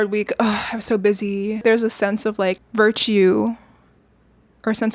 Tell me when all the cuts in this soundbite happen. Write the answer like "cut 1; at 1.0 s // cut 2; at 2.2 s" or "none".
cut 1; at 1.6 s // cut 2; at 2.6 s